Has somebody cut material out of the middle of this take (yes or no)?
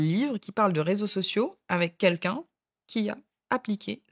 no